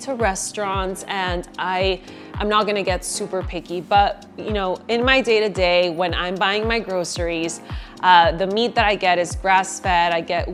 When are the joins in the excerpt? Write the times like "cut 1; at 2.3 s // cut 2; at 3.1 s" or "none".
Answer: none